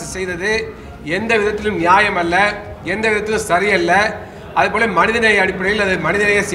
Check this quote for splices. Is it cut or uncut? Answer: uncut